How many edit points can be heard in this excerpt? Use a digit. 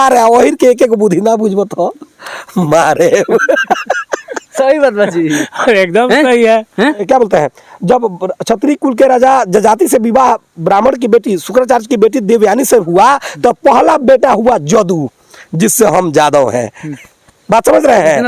1